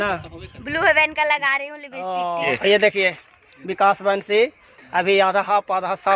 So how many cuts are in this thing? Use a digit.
1